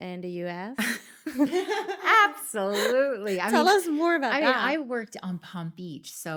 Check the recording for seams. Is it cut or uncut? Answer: uncut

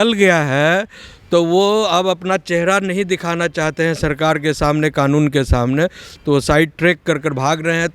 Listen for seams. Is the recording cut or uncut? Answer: uncut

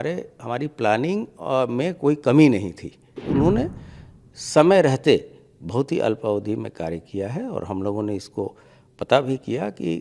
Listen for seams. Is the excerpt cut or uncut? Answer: cut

